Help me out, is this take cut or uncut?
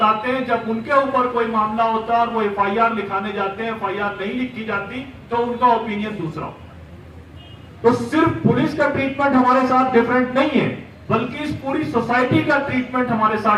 uncut